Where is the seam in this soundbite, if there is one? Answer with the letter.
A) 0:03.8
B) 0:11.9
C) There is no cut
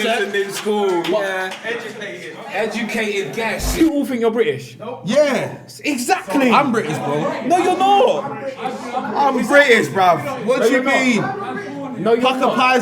A